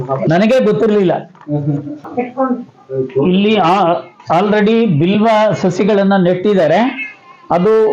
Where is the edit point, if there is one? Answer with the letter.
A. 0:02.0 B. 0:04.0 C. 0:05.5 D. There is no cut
A